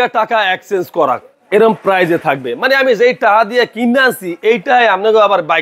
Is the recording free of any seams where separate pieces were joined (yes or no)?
yes